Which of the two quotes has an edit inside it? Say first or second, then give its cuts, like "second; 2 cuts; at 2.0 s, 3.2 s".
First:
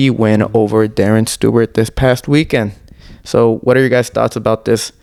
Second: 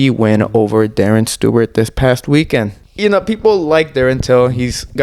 second; 1 cut; at 2.8 s